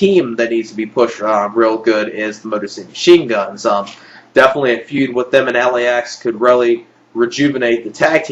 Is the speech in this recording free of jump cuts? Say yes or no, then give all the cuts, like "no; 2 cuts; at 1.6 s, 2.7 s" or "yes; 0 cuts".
yes; 0 cuts